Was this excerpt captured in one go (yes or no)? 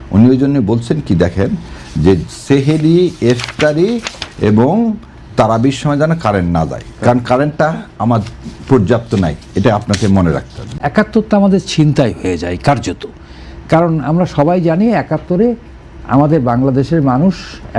no